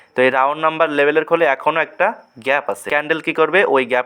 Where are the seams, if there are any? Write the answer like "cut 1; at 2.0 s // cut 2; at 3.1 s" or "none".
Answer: cut 1; at 2.9 s